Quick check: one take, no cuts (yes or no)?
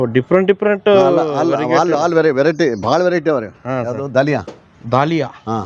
no